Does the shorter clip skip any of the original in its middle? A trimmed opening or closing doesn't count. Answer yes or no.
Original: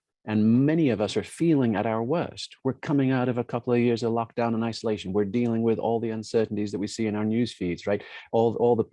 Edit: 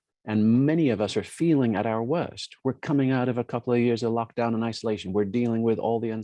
no